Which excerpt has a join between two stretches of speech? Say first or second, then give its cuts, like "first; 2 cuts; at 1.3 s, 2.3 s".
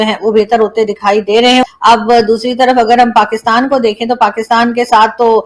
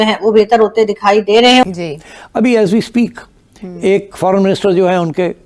second; 1 cut; at 1.7 s